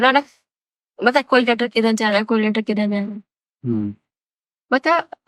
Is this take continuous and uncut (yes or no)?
yes